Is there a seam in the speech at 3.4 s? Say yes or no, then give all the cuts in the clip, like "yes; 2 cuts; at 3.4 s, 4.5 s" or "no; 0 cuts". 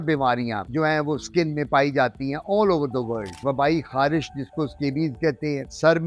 yes; 1 cut; at 3.4 s